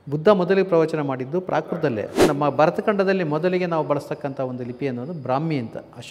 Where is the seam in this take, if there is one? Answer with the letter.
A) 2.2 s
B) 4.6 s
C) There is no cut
A